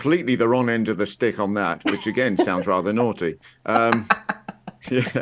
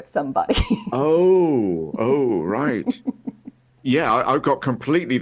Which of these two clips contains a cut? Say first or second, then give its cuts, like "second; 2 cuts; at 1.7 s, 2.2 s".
second; 1 cut; at 3.7 s